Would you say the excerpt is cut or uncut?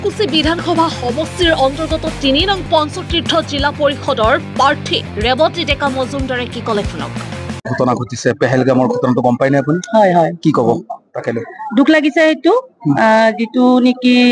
uncut